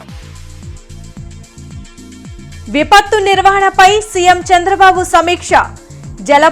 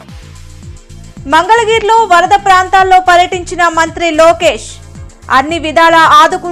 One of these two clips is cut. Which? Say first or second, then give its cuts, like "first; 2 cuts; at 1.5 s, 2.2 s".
second; 1 cut; at 1.0 s